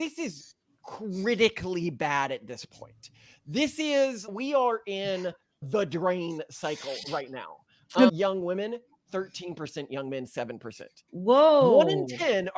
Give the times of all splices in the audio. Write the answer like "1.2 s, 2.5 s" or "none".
8.1 s